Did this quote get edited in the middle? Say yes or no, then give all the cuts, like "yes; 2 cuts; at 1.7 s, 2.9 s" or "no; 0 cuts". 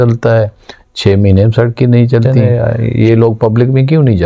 yes; 1 cut; at 2.4 s